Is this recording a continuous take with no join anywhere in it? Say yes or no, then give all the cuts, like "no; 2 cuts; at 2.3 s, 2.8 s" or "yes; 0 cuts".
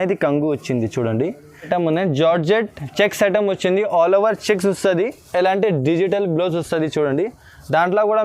no; 1 cut; at 1.7 s